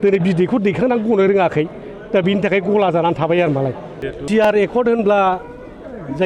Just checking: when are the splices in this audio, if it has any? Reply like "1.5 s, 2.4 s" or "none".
3.9 s